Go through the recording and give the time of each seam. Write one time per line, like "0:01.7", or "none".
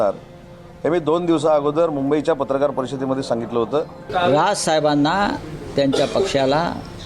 0:04.0